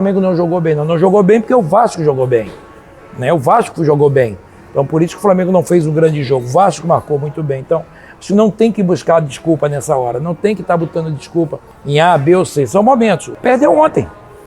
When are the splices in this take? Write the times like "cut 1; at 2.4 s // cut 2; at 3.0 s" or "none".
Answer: cut 1; at 13.3 s